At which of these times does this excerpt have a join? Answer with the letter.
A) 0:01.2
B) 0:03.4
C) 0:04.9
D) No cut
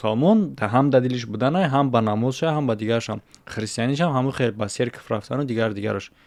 D